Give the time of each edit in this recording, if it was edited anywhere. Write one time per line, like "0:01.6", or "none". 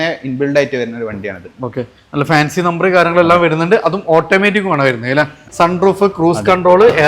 0:05.4